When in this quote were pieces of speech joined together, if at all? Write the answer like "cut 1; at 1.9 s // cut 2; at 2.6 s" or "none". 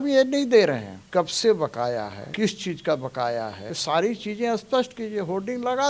cut 1; at 0.9 s // cut 2; at 2.2 s // cut 3; at 3.7 s